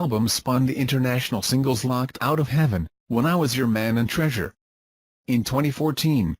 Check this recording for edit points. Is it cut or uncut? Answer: cut